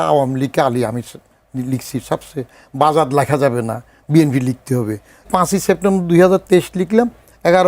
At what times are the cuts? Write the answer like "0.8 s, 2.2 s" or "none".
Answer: 5.3 s